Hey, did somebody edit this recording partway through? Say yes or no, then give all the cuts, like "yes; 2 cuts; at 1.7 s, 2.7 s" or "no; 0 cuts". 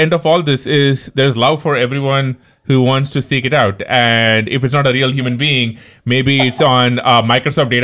no; 0 cuts